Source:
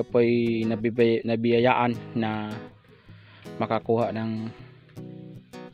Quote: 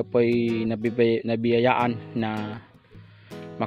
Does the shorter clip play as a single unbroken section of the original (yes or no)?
yes